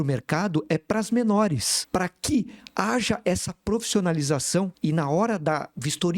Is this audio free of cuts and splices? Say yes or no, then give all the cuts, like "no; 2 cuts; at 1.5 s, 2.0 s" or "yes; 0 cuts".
no; 2 cuts; at 1.7 s, 4.7 s